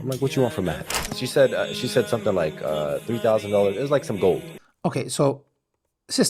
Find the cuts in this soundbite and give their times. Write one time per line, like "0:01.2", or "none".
none